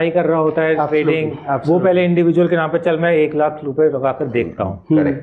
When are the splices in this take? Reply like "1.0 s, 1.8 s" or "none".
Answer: none

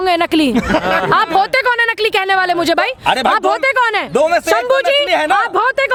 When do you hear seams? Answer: none

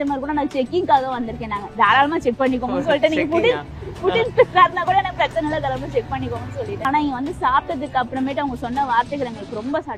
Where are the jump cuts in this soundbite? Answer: 6.8 s

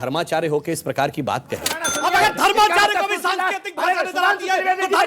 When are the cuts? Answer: 1.9 s

